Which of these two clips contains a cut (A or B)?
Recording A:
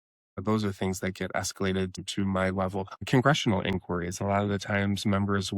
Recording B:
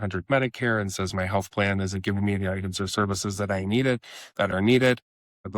A